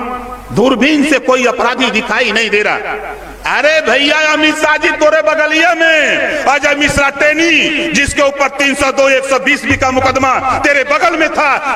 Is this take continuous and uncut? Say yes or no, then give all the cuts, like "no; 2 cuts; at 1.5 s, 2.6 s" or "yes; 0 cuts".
yes; 0 cuts